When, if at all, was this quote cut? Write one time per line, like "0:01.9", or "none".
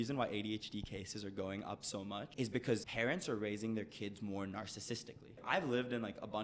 0:02.4
0:05.4